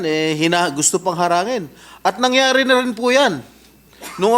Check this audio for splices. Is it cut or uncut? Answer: uncut